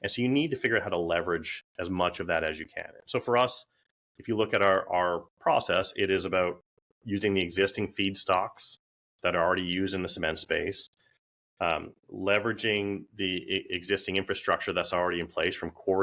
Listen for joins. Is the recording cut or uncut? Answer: uncut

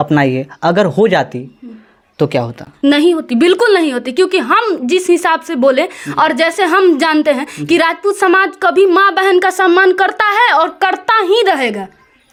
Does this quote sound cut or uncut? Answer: uncut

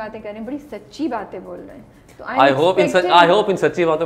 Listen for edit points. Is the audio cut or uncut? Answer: uncut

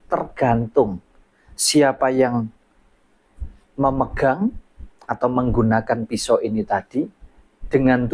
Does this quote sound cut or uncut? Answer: uncut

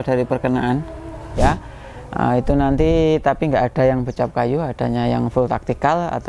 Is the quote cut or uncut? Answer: cut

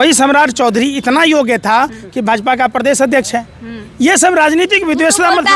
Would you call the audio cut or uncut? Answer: uncut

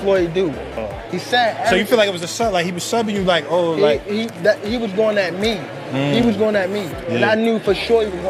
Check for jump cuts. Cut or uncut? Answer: uncut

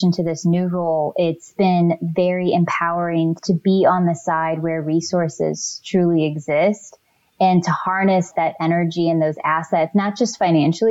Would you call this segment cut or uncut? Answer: cut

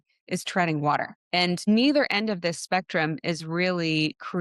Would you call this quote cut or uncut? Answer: cut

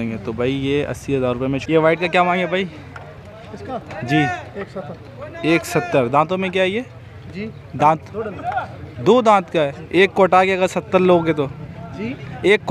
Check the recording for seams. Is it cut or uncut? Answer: cut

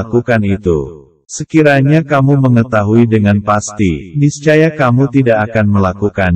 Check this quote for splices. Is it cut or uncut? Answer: uncut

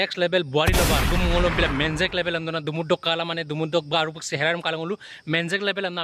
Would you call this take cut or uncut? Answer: cut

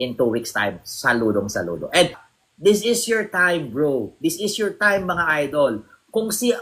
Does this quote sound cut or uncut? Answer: cut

